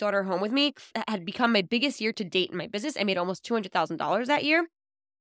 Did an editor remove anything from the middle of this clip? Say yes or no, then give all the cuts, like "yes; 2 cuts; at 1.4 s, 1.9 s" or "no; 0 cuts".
yes; 1 cut; at 0.9 s